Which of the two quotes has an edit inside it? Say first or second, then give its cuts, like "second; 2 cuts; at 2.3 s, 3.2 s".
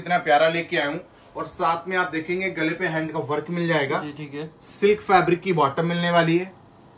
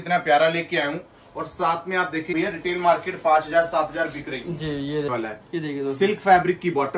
second; 2 cuts; at 2.3 s, 5.1 s